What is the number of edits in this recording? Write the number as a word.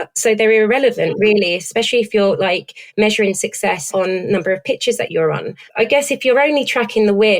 one